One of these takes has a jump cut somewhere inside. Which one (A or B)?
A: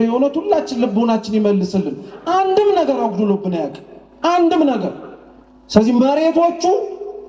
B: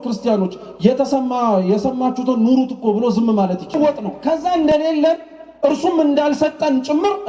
B